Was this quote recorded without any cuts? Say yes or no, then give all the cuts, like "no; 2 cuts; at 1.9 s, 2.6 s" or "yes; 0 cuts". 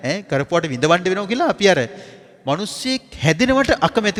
yes; 0 cuts